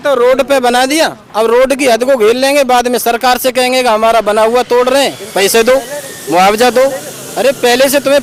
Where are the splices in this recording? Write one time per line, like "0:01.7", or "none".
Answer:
none